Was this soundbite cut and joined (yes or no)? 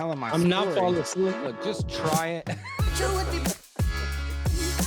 no